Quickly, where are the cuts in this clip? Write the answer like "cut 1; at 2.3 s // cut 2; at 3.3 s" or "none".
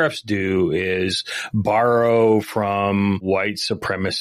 cut 1; at 3.2 s